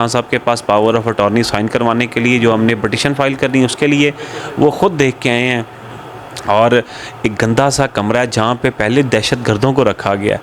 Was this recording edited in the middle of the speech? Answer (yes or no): no